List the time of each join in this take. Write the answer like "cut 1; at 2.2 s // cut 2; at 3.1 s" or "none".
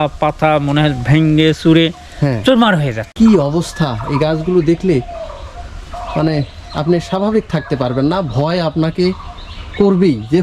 cut 1; at 3.0 s